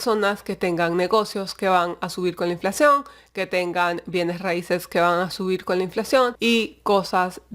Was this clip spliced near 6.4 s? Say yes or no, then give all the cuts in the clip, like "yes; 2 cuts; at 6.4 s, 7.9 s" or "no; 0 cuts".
yes; 1 cut; at 6.4 s